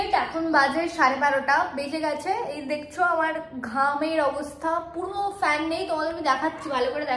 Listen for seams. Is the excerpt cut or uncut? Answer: uncut